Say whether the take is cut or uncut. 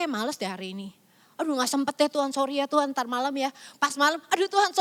uncut